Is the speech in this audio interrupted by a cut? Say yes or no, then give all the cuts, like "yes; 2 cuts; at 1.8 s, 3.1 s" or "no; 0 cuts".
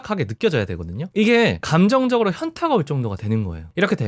no; 0 cuts